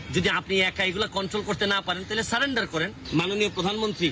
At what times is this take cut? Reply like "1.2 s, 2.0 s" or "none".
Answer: 3.1 s